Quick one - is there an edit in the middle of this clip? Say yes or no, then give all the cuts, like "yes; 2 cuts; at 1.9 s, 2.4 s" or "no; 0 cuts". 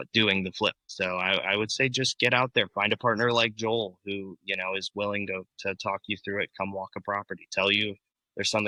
no; 0 cuts